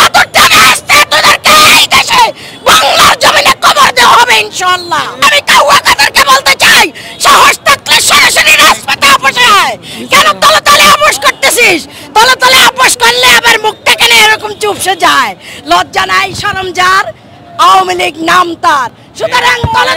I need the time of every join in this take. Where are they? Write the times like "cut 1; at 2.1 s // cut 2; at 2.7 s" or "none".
cut 1; at 5.2 s